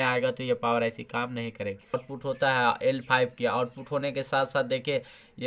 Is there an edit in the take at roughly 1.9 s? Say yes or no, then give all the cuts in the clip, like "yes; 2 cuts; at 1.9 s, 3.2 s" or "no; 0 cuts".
yes; 1 cut; at 1.9 s